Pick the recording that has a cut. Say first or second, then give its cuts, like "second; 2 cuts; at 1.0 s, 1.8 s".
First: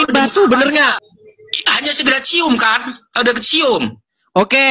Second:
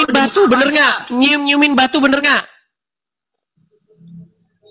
first; 1 cut; at 1.0 s